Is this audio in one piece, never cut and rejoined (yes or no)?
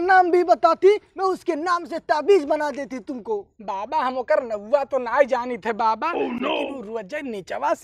yes